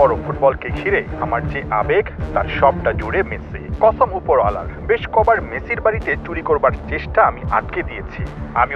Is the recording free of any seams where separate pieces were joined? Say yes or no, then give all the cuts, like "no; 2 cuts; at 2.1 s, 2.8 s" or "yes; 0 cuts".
yes; 0 cuts